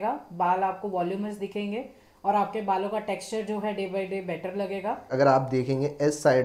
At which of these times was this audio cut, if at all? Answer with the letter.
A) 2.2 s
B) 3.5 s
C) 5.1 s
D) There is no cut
C